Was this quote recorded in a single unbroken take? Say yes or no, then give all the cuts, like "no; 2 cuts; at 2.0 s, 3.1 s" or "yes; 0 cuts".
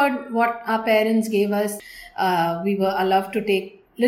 no; 1 cut; at 1.8 s